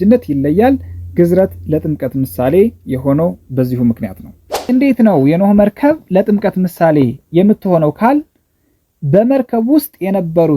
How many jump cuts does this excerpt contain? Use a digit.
1